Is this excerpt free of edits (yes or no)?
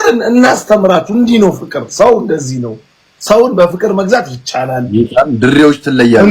yes